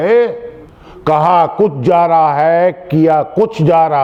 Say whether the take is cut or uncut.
uncut